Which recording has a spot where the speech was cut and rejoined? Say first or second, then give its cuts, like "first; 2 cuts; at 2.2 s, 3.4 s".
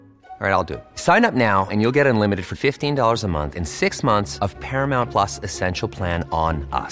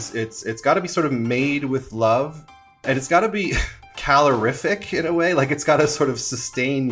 second; 2 cuts; at 2.8 s, 3.9 s